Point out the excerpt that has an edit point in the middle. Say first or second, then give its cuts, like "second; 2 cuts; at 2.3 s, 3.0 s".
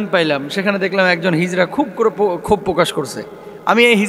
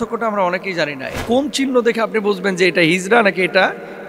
second; 1 cut; at 1.2 s